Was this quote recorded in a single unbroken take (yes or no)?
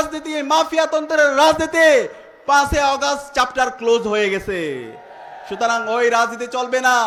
yes